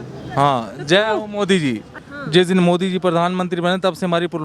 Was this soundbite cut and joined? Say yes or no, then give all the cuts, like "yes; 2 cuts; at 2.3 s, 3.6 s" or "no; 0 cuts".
yes; 1 cut; at 2.0 s